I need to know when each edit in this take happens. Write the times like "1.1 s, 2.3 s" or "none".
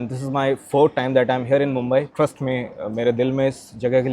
2.1 s